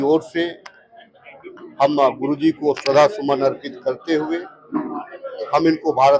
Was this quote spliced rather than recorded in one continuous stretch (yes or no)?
no